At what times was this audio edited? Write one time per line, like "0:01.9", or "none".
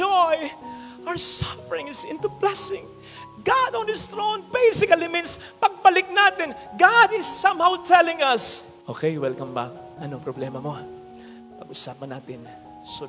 none